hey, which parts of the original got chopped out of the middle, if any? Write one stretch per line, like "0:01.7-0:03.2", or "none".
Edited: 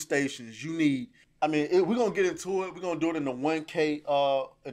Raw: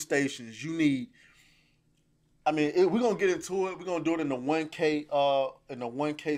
0:01.2-0:02.2